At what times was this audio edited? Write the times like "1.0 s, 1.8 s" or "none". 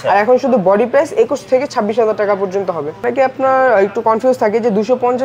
3.0 s